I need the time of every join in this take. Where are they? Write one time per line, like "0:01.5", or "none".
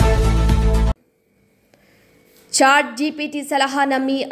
0:00.9